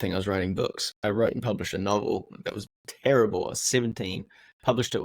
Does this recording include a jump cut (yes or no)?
yes